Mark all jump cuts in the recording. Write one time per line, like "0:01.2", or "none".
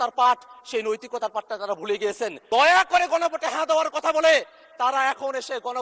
0:02.3

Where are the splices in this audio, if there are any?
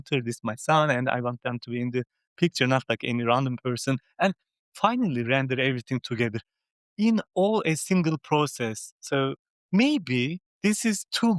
none

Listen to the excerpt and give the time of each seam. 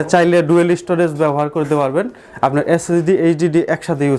none

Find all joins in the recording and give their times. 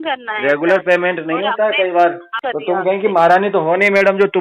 0:02.3

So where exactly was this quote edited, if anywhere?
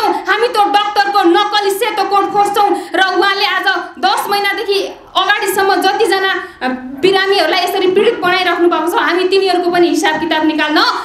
none

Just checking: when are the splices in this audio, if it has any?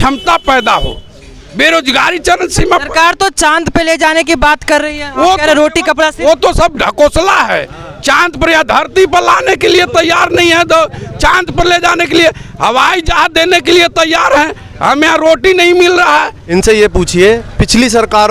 0:16.4

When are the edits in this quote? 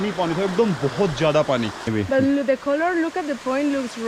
0:01.8

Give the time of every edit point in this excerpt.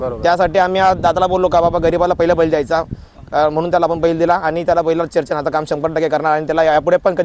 none

